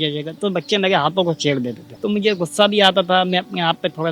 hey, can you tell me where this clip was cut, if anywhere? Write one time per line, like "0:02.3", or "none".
0:01.8